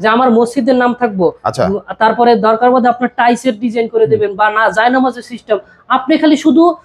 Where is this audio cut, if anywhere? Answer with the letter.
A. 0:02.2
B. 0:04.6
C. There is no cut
C